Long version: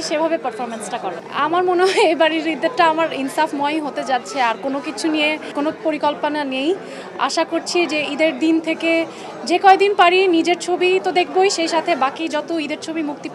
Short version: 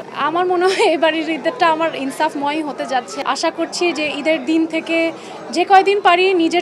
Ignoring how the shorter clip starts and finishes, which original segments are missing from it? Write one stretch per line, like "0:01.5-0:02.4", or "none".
0:04.3-0:07.1

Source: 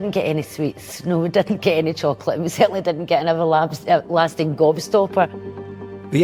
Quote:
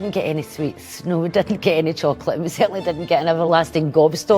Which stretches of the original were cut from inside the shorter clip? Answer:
0:03.5-0:04.1

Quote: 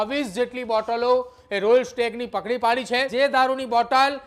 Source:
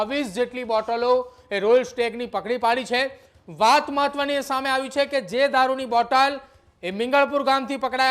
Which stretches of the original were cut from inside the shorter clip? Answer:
0:03.1-0:05.3

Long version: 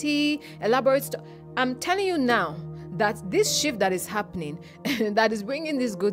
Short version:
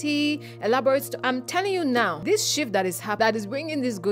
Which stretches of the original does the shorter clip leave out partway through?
0:01.1-0:01.5
0:02.5-0:03.2
0:04.2-0:05.1

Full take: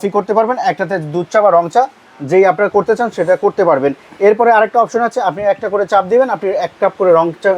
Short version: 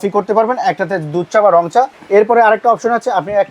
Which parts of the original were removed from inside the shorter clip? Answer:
0:02.0-0:04.1

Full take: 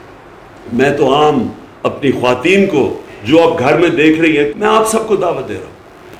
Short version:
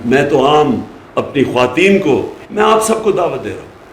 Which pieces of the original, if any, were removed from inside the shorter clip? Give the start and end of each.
0:03.2-0:04.5

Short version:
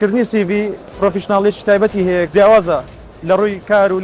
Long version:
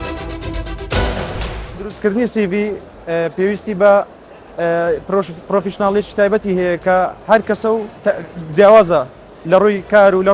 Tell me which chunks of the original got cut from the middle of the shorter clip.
0:02.9-0:05.4
0:06.8-0:08.5

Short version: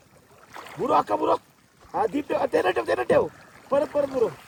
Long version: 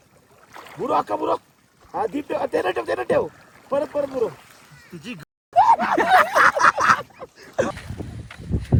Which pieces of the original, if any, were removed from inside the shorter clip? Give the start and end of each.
none

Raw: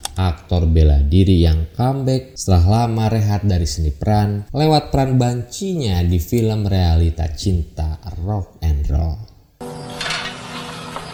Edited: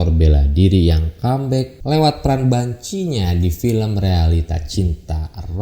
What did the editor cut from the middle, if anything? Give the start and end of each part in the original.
0:02.3-0:04.4

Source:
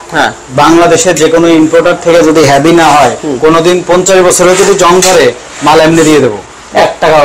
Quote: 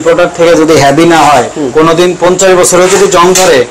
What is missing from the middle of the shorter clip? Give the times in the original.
none

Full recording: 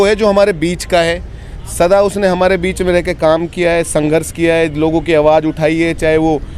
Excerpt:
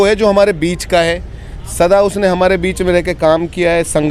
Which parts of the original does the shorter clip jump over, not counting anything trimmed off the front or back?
none

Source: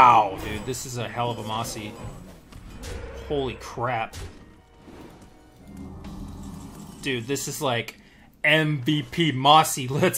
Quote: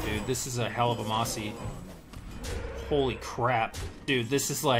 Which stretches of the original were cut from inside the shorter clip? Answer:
0:04.3-0:06.9

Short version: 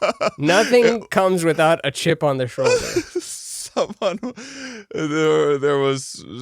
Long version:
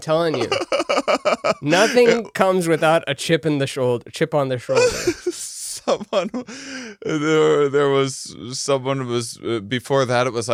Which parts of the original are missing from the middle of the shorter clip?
0:03.3-0:04.2

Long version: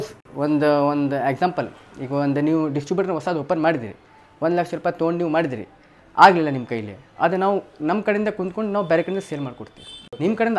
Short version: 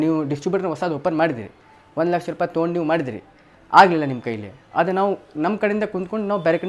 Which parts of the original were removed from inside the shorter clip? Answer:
none

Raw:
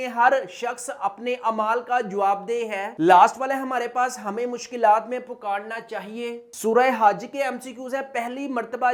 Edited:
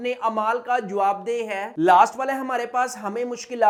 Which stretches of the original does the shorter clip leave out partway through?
none

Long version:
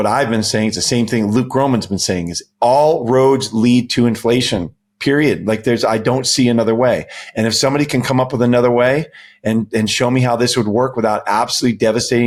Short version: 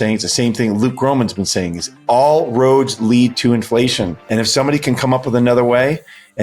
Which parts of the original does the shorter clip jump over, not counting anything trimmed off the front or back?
0:04.7-0:07.3

